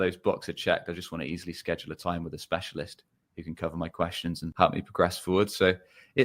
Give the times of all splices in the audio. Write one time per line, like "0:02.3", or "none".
0:04.5